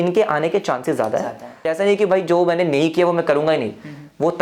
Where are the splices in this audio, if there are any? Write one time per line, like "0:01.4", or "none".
0:01.7